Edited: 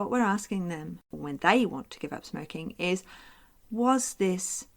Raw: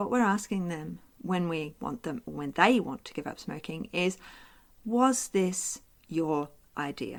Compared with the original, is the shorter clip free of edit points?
no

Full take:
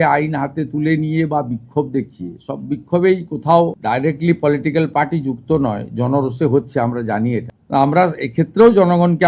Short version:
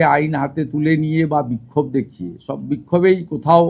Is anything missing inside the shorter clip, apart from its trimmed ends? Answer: no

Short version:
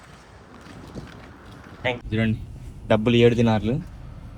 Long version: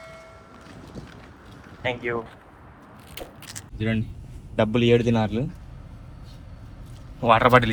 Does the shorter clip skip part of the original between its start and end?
yes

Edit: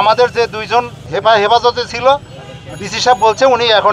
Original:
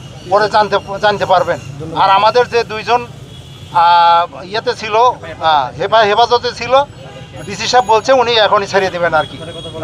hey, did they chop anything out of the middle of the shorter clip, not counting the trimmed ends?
yes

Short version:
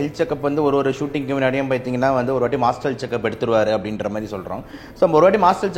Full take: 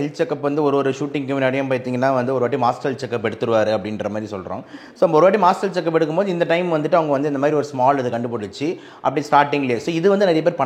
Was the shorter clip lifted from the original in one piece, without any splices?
yes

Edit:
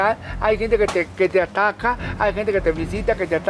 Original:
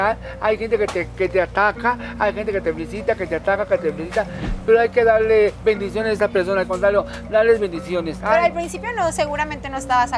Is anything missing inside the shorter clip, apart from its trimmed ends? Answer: no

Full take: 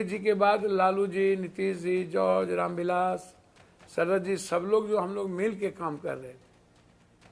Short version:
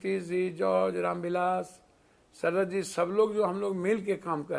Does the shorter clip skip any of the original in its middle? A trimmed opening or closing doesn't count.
no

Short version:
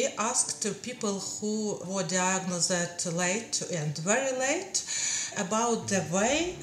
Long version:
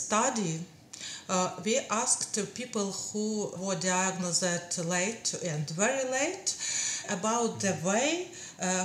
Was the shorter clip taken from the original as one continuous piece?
yes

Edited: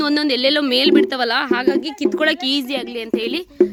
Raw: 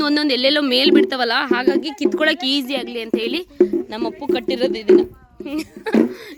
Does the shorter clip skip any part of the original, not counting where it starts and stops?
no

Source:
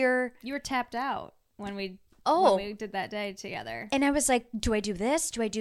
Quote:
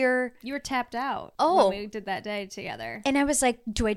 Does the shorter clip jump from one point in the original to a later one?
yes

